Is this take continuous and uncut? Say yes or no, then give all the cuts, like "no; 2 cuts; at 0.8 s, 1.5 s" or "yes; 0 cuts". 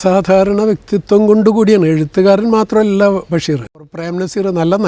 no; 1 cut; at 3.9 s